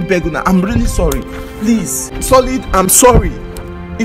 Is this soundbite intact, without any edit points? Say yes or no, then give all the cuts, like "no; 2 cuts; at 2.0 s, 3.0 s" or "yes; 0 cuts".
no; 1 cut; at 2.1 s